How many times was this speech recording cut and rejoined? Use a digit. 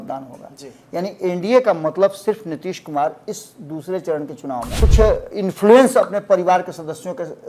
1